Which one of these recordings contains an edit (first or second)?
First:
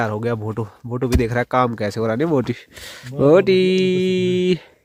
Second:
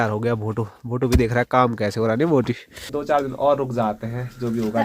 second